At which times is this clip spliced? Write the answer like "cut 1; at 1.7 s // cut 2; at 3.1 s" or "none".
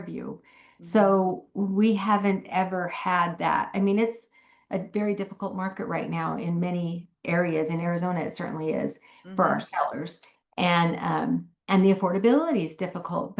none